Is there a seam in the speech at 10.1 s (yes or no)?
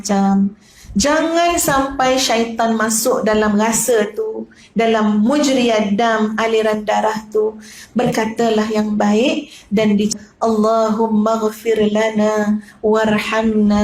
yes